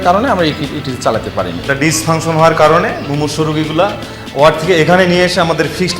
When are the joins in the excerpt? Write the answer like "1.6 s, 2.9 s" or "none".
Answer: 1.7 s